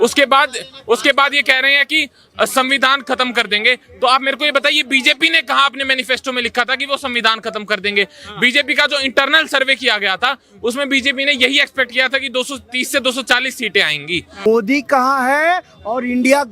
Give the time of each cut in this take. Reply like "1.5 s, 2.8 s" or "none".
14.4 s